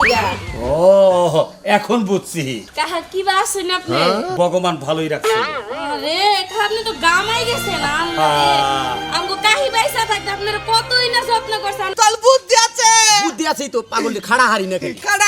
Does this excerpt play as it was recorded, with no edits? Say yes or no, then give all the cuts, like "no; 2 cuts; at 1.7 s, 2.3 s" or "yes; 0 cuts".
no; 2 cuts; at 2.6 s, 11.9 s